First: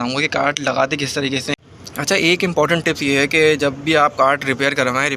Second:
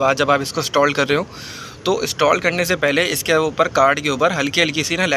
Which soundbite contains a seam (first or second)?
first